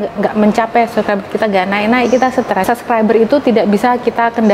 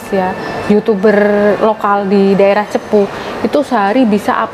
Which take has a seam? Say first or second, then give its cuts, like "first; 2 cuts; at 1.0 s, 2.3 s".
first; 1 cut; at 2.8 s